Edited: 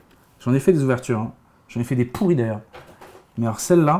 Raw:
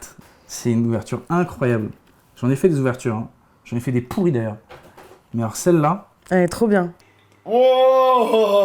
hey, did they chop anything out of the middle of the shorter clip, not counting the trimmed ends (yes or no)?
no